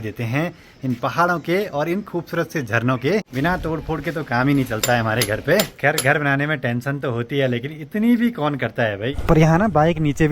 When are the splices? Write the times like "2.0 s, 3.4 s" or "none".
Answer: 3.3 s, 5.7 s, 9.1 s